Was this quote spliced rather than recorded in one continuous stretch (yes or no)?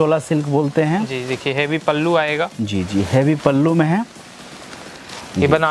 no